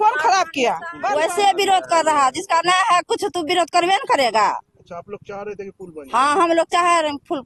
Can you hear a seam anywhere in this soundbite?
yes; 1 cut; at 0.9 s

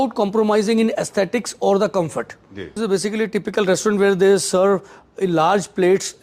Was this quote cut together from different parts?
yes; 1 cut; at 2.7 s

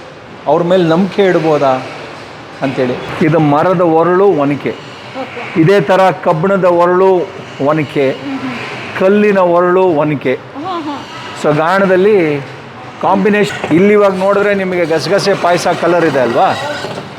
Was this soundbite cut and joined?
yes; 2 cuts; at 3.1 s, 13.5 s

